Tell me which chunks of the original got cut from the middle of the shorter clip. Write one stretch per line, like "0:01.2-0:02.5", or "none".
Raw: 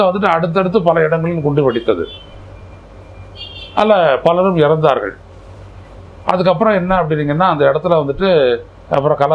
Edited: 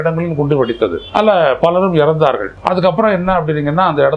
0:02.1-0:03.6
0:05.1-0:06.1